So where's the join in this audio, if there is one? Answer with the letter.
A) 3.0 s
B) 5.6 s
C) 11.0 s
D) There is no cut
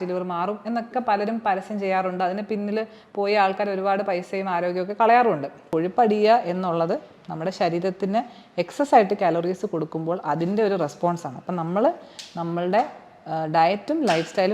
B